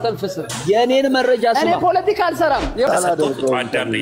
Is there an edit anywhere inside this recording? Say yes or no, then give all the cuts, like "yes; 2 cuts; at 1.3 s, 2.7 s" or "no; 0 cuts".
yes; 1 cut; at 2.9 s